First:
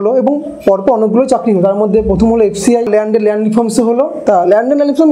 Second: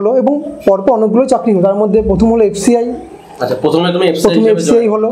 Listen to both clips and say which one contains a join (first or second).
first